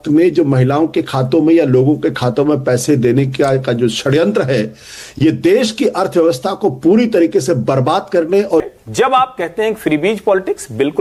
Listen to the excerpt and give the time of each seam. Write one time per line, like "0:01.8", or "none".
0:08.6